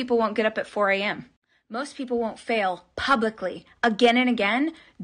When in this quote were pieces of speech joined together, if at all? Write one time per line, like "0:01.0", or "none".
0:01.3

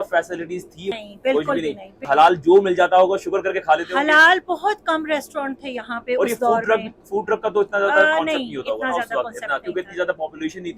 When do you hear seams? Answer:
0:00.9
0:02.0

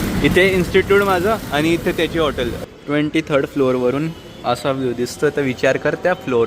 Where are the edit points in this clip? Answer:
0:02.6

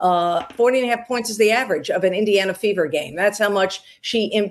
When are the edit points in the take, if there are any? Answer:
0:02.5

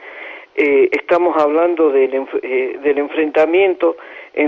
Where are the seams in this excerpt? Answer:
0:01.1

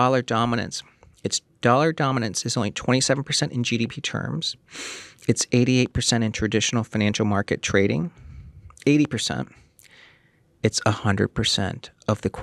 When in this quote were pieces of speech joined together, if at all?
none

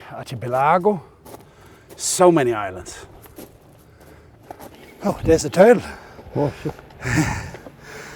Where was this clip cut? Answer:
0:04.8

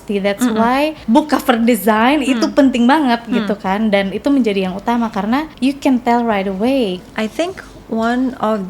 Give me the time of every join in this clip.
0:01.0
0:05.5
0:07.1

